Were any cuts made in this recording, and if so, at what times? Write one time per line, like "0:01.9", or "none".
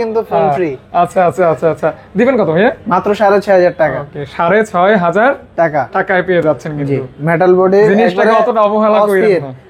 none